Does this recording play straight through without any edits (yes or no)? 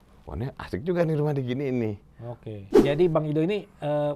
no